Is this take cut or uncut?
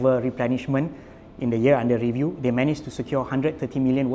uncut